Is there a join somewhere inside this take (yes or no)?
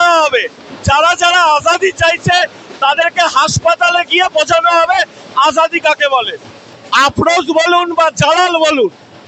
no